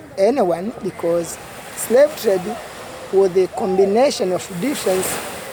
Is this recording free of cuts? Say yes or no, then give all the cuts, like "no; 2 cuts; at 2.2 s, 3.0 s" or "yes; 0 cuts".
yes; 0 cuts